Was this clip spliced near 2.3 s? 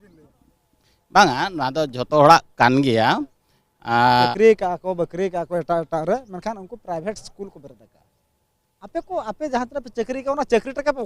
no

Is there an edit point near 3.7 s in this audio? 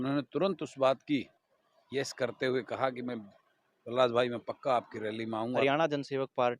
no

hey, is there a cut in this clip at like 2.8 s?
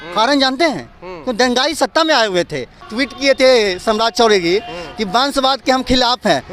yes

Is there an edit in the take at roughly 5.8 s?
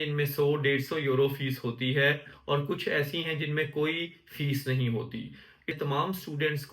yes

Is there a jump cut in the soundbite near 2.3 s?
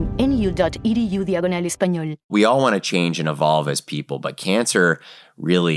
yes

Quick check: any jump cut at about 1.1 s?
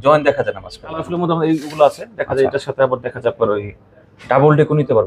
yes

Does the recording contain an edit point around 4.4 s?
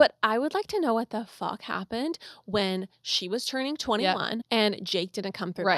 yes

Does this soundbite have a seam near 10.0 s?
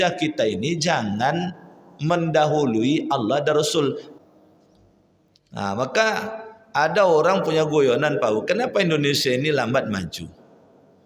no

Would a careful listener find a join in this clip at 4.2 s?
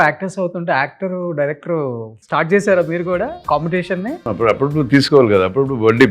yes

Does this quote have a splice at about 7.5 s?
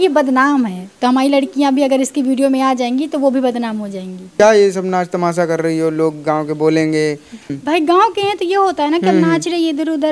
yes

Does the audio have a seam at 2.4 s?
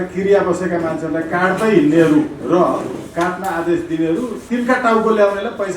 yes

